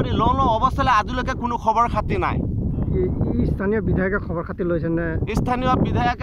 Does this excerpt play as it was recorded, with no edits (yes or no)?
yes